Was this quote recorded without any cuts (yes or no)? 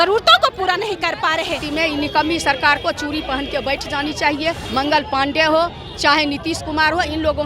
no